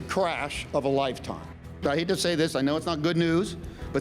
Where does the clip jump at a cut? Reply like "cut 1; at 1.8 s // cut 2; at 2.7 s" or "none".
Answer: cut 1; at 1.8 s